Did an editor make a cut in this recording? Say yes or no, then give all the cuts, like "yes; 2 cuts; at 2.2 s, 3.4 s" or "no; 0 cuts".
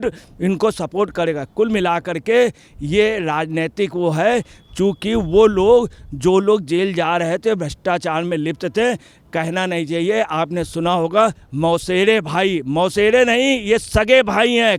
no; 0 cuts